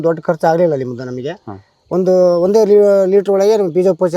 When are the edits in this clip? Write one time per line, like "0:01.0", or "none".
none